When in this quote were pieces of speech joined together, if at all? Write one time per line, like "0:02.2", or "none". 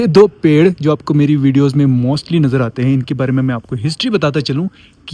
none

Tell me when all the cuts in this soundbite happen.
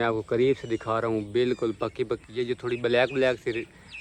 none

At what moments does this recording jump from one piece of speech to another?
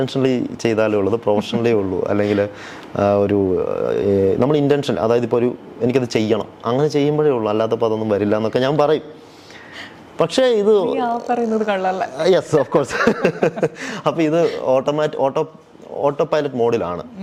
none

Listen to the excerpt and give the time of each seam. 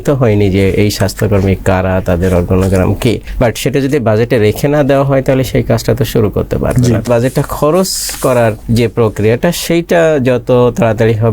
0:03.3
0:07.0
0:08.6

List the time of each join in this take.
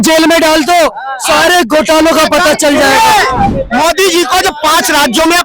0:03.6

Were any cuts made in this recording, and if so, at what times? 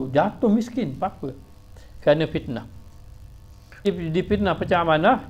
0:03.9

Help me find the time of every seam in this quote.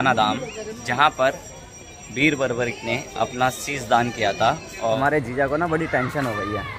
0:04.7

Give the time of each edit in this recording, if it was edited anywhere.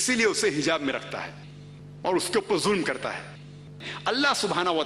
0:03.9

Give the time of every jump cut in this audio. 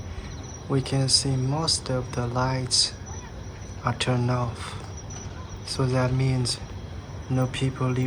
none

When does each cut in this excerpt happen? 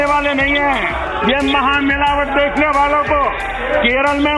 0:01.0
0:03.5

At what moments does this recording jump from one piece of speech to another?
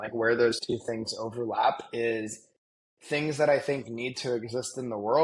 none

